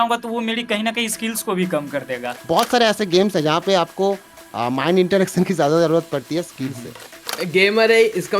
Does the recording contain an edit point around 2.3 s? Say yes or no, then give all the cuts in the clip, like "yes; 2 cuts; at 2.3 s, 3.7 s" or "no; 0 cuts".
yes; 2 cuts; at 2.3 s, 7.2 s